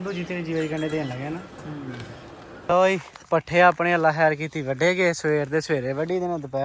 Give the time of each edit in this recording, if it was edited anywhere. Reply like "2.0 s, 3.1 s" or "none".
2.5 s